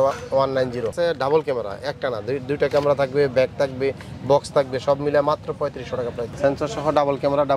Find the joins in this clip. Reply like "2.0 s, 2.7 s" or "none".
0.9 s, 6.2 s